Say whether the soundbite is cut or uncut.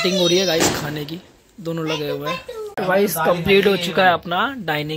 cut